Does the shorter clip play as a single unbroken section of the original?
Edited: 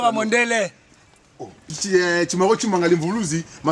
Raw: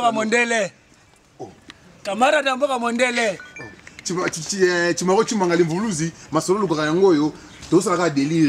no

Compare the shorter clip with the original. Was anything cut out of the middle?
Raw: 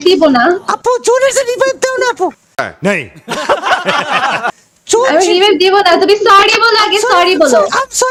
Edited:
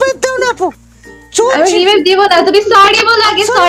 yes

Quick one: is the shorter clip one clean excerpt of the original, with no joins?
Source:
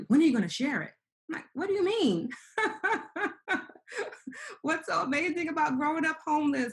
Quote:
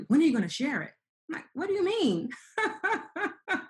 yes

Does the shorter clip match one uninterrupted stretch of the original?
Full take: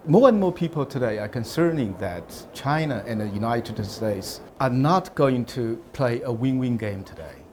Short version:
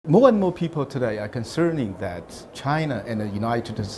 yes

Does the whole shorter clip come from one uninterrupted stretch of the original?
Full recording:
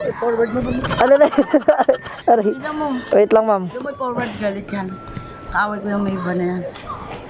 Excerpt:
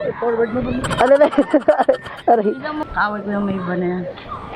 no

